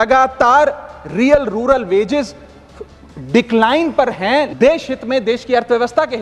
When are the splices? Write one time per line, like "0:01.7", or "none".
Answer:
0:04.5